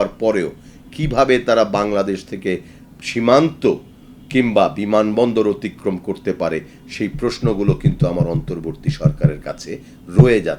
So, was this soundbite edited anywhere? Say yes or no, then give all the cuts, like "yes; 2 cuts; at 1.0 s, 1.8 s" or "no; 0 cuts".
no; 0 cuts